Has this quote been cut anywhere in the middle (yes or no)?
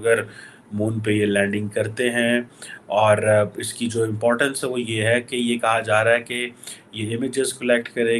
no